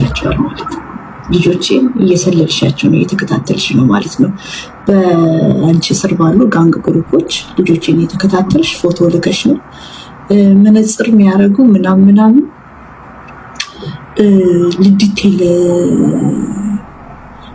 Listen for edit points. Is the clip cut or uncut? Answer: uncut